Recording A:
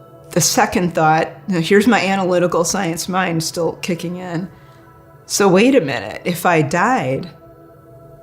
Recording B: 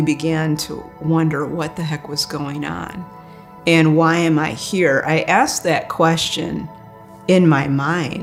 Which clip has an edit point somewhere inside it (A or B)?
A